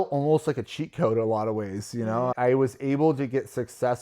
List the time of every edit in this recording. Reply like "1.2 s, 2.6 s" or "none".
2.3 s